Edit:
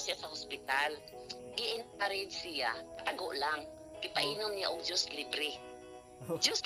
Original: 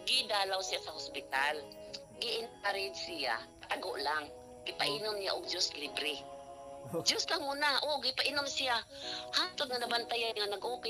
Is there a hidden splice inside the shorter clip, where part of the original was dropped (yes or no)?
no